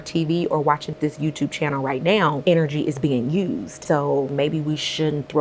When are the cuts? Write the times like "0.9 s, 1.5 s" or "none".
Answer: 0.9 s, 2.4 s, 4.1 s

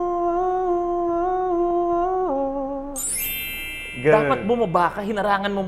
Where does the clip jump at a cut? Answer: none

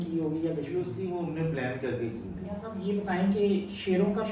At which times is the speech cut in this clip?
0.9 s, 2.6 s

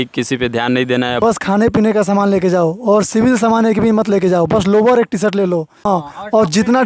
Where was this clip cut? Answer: 1.2 s, 5.7 s

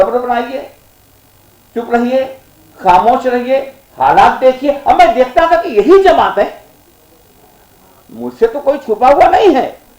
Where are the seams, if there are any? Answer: none

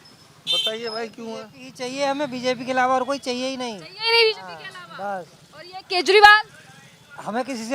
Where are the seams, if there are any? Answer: none

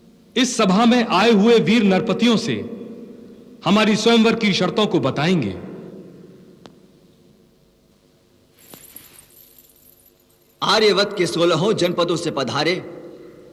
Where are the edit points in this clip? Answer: none

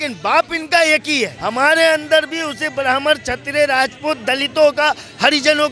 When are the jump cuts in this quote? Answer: 1.4 s

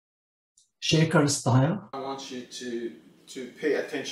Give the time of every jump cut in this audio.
1.9 s

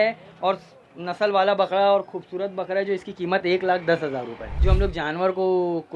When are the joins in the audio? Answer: 4.5 s

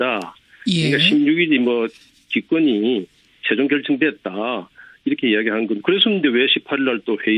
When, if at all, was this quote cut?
none

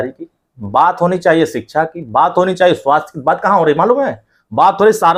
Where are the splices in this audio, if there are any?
none

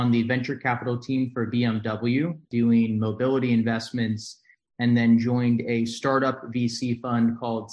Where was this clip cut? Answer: 2.4 s

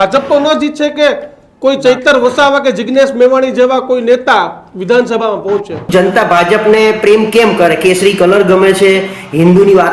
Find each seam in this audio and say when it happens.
5.8 s

